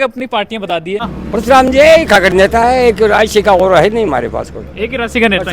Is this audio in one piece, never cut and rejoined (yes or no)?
no